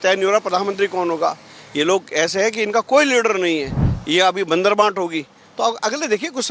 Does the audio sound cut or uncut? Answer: uncut